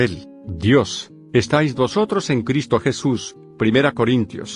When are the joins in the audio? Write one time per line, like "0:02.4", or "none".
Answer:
0:03.6